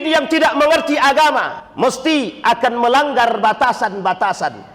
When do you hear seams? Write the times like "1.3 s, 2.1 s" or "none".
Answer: 1.6 s